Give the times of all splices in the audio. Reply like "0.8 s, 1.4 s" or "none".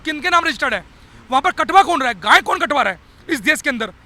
none